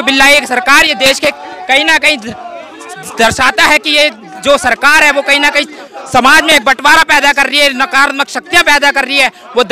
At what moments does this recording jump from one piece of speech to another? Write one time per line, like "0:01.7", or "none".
none